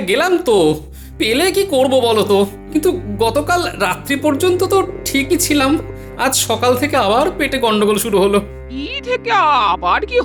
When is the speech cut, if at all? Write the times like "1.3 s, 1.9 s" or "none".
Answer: none